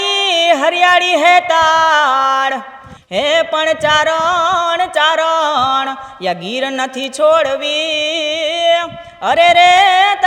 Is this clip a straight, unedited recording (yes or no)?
yes